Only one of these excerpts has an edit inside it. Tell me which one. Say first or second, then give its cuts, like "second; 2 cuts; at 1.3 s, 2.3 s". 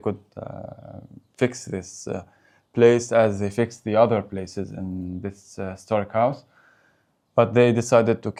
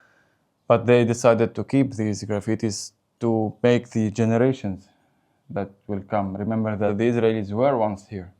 second; 1 cut; at 6.9 s